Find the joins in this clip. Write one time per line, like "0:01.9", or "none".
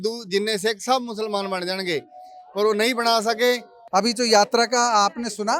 0:03.8